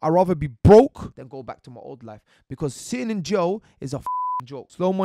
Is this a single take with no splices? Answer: no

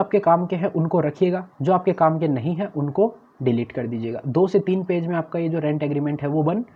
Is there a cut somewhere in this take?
no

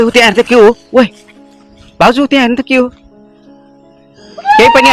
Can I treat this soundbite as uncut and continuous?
yes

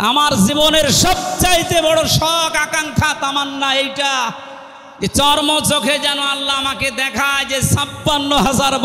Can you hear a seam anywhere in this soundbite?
no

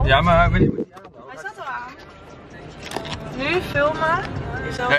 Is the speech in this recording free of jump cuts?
yes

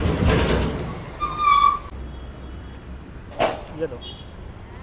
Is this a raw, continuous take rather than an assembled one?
yes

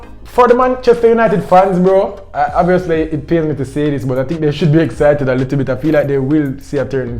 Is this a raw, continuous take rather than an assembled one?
yes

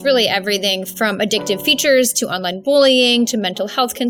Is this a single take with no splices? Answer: yes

